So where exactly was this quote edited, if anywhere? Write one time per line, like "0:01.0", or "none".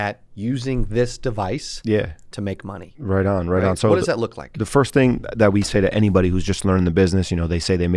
none